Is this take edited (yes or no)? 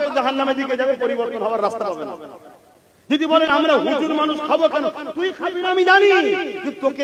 no